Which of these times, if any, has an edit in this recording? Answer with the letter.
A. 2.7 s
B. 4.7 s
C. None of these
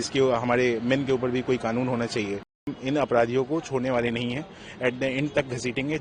A